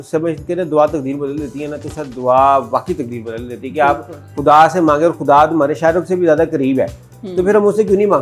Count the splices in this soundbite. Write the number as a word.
zero